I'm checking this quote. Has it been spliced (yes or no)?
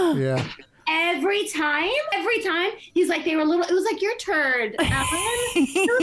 yes